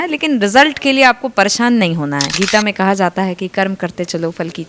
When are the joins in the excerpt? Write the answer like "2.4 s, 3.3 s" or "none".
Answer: 2.3 s